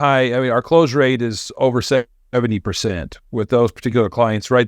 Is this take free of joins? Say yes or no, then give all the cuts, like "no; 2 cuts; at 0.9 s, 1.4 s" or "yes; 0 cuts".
yes; 0 cuts